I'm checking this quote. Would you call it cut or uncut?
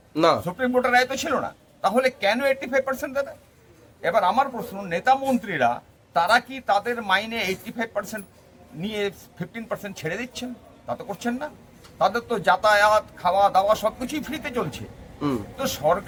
uncut